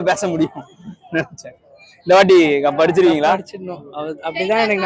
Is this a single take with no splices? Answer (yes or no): yes